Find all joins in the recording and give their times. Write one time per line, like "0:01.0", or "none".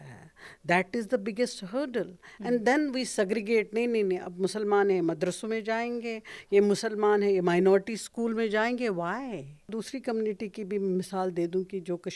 0:09.7